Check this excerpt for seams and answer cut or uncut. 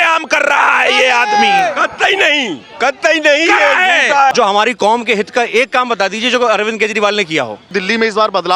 cut